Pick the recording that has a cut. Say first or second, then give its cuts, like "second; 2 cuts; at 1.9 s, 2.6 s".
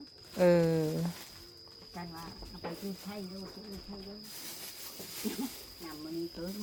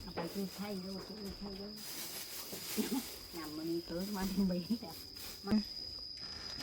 second; 1 cut; at 5.5 s